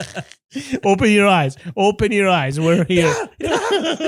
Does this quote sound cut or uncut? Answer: uncut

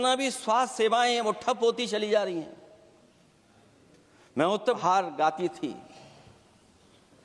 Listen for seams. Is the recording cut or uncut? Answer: cut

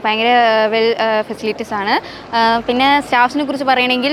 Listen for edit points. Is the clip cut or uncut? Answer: uncut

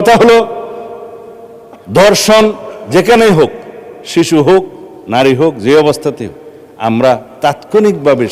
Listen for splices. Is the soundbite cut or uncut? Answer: uncut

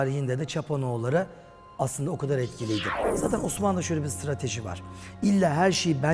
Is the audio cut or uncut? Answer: cut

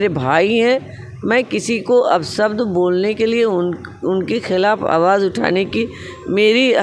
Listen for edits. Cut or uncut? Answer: uncut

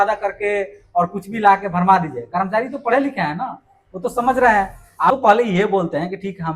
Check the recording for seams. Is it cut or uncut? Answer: cut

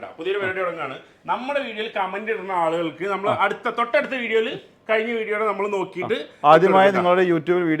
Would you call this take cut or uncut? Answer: uncut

